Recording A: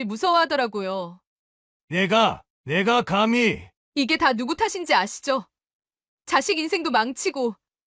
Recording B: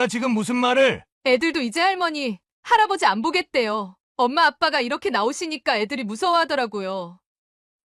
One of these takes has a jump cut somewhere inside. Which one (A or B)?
B